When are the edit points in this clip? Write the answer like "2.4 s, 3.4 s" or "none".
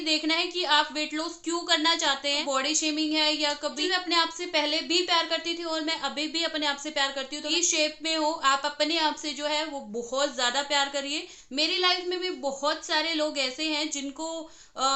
2.4 s, 3.8 s, 7.5 s, 11.4 s